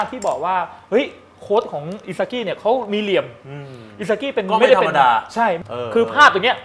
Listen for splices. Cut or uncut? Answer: cut